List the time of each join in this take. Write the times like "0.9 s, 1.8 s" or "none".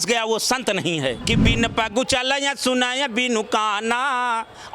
1.2 s